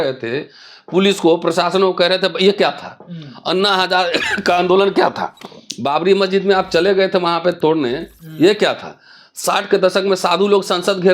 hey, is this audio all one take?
yes; 0 cuts

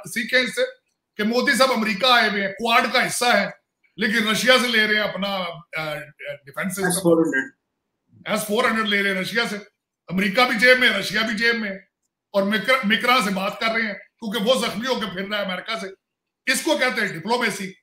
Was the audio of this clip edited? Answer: no; 0 cuts

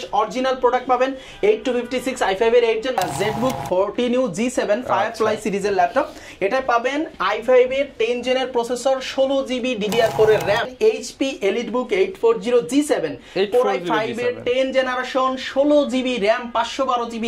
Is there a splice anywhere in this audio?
yes; 2 cuts; at 3.0 s, 10.7 s

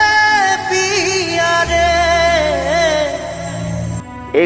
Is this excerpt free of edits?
yes; 0 cuts

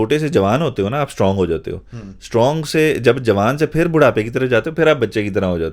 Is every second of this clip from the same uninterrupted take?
yes; 0 cuts

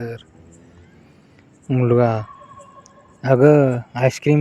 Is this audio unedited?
yes; 0 cuts

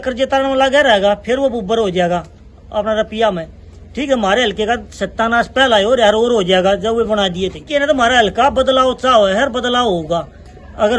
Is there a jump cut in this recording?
yes; 1 cut; at 7.7 s

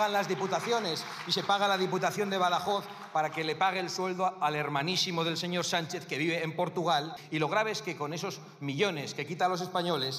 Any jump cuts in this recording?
yes; 1 cut; at 7.2 s

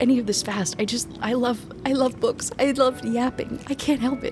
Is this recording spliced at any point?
no; 0 cuts

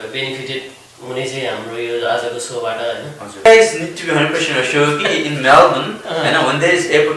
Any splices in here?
yes; 1 cut; at 3.5 s

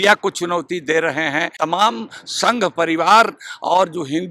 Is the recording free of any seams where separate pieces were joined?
no; 1 cut; at 1.5 s

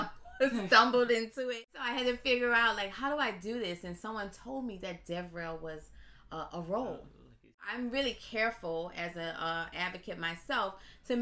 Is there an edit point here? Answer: yes; 2 cuts; at 1.8 s, 7.6 s

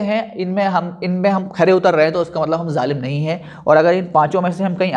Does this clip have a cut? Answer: no; 0 cuts

